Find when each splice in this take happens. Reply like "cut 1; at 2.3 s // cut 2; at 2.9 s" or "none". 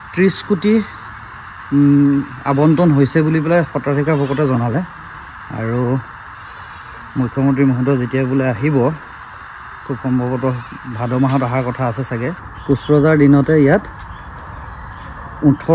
cut 1; at 12.5 s